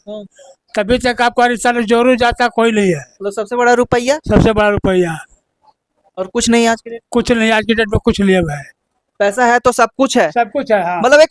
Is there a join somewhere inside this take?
no; 0 cuts

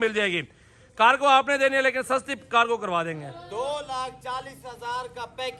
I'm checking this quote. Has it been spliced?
no; 0 cuts

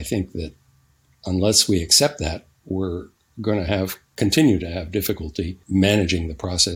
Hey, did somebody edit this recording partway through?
yes; 1 cut; at 5.6 s

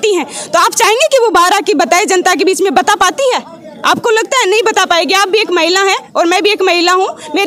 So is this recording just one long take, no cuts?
yes; 0 cuts

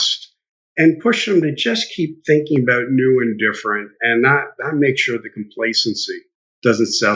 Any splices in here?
no; 0 cuts

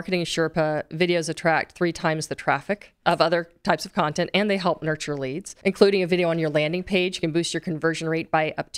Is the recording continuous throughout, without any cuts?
no; 2 cuts; at 2.9 s, 5.5 s

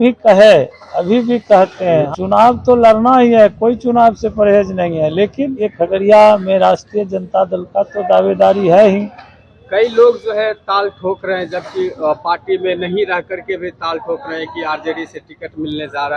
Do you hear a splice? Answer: yes; 2 cuts; at 2.1 s, 5.7 s

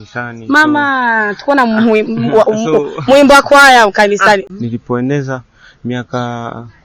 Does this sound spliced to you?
yes; 1 cut; at 4.5 s

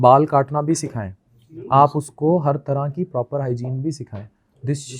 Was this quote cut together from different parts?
no; 0 cuts

